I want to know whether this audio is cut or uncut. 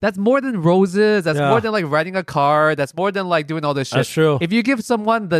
uncut